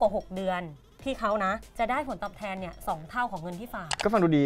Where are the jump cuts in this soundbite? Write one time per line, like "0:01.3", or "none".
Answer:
0:01.7